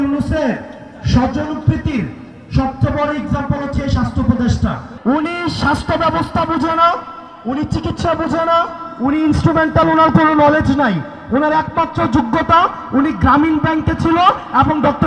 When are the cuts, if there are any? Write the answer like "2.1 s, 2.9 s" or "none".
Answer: 4.9 s

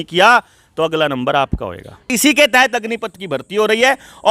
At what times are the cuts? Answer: 2.1 s

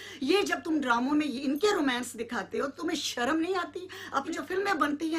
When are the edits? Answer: 4.3 s

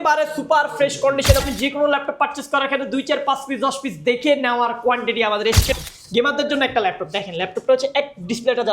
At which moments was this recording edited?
1.4 s, 5.8 s

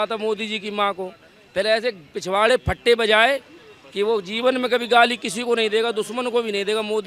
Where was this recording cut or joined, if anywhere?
none

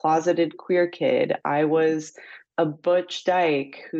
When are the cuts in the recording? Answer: none

